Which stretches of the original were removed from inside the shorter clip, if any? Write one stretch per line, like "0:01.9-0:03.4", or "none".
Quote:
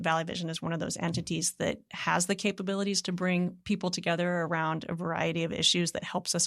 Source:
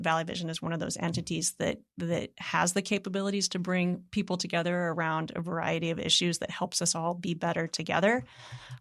0:01.9-0:02.4